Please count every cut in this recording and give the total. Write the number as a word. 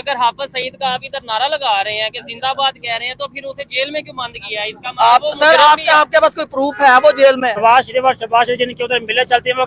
one